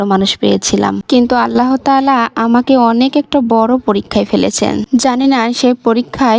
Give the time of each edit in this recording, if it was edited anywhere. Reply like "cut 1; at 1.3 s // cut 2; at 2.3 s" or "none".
none